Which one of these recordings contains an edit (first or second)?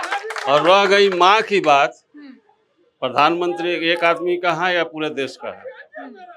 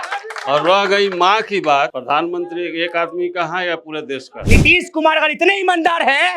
second